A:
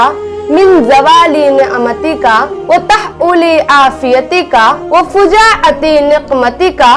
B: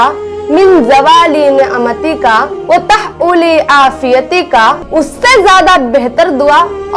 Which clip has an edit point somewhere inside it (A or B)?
B